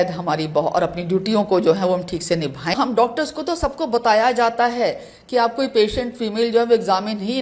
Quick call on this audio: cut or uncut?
cut